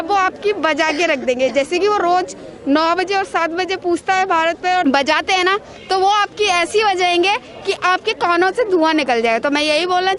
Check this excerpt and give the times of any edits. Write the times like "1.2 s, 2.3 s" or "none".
4.8 s